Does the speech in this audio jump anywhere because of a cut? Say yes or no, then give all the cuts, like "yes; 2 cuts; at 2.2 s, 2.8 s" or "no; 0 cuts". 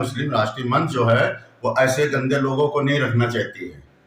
no; 0 cuts